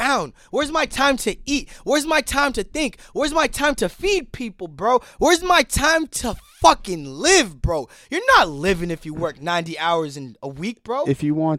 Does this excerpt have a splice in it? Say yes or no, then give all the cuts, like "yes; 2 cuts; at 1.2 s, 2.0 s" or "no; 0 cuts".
no; 0 cuts